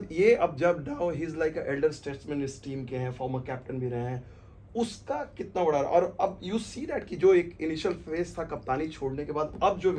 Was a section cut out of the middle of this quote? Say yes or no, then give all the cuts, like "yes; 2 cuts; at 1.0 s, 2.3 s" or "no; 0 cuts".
no; 0 cuts